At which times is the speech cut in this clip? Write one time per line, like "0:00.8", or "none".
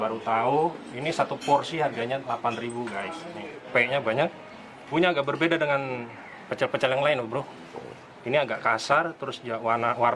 0:03.6
0:04.9